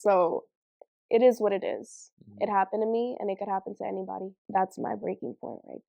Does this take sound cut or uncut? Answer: cut